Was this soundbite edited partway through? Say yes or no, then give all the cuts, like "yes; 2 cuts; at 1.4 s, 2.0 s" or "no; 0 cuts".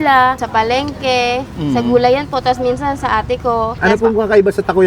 yes; 1 cut; at 3.8 s